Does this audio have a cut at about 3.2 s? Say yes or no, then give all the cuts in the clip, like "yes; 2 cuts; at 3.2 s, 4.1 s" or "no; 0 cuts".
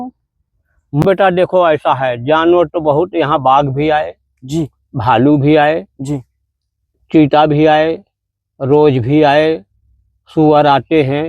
no; 1 cut; at 1.0 s